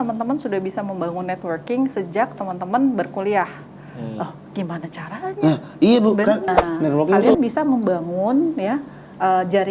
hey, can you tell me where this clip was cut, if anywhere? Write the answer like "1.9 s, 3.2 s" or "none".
7.3 s

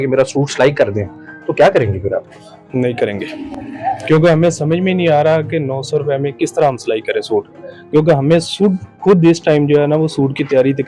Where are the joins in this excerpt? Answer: none

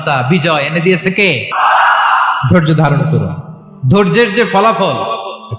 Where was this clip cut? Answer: 1.5 s

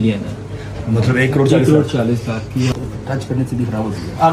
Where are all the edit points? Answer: 2.7 s

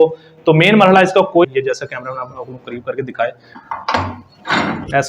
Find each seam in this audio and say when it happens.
1.4 s

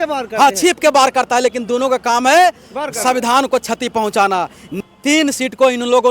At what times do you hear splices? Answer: 4.8 s

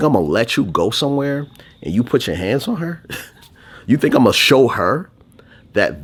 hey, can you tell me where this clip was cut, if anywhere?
none

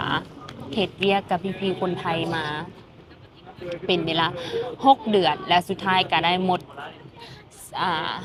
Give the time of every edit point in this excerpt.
none

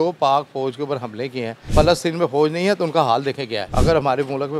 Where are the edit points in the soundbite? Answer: 1.6 s, 3.6 s

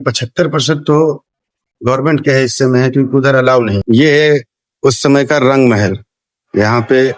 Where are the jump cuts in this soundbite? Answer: 3.8 s

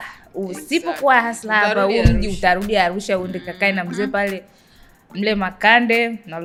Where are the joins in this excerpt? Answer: none

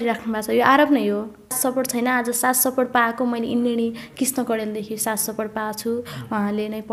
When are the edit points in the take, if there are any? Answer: 1.6 s

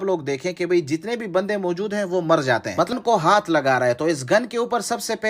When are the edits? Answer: 2.9 s

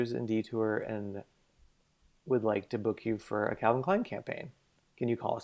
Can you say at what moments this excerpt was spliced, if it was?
none

